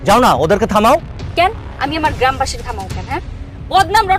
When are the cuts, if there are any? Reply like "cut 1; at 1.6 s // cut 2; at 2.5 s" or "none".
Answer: cut 1; at 1.2 s

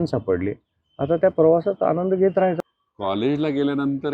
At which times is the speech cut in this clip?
cut 1; at 2.6 s

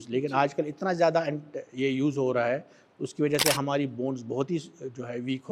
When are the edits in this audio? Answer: none

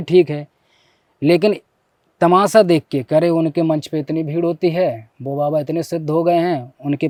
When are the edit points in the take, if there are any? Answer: none

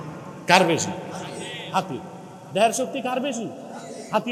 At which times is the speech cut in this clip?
none

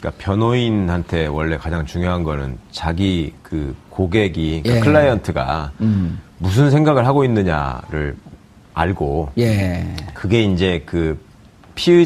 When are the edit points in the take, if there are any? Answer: none

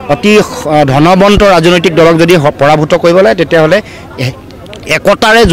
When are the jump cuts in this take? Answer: none

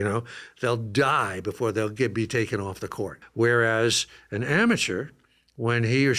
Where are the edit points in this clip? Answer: cut 1; at 3.2 s

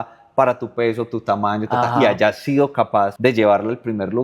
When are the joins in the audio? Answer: cut 1; at 3.1 s

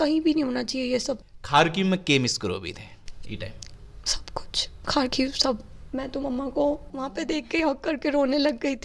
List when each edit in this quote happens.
cut 1; at 1.3 s // cut 2; at 6.9 s

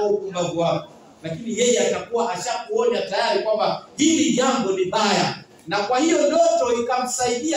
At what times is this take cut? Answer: none

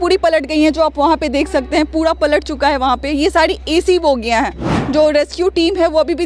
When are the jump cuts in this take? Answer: cut 1; at 4.7 s

